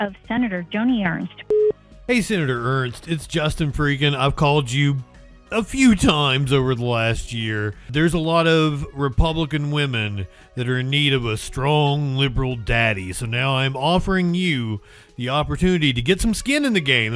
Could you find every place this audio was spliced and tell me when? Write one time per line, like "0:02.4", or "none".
0:01.5
0:07.9